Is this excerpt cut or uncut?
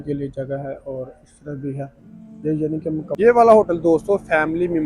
cut